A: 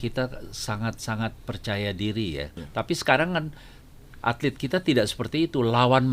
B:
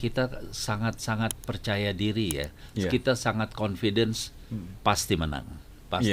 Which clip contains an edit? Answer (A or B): A